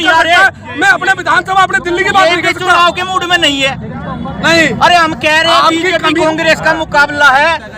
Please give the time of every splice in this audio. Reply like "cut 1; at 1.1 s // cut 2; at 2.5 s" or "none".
none